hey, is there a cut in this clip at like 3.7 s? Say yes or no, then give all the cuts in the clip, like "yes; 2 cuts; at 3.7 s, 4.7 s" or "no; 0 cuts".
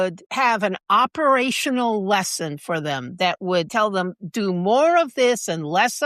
yes; 1 cut; at 3.7 s